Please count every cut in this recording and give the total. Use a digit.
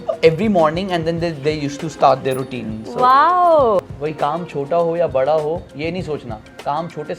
1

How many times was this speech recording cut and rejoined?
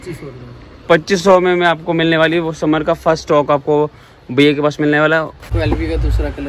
1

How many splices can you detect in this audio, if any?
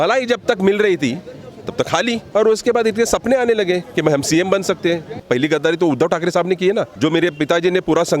3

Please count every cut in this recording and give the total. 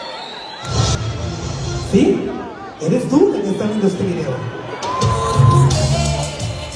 1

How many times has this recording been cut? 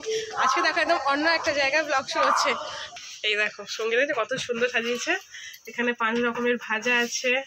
1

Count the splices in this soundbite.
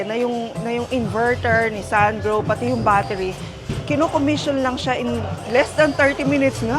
0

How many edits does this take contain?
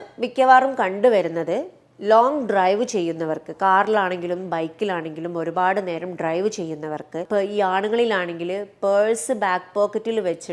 1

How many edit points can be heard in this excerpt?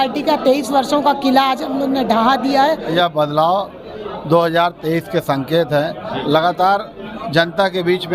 1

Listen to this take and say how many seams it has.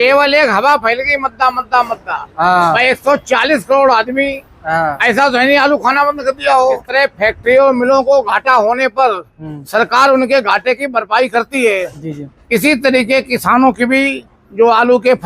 1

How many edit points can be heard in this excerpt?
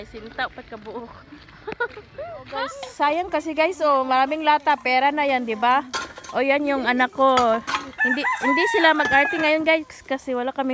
1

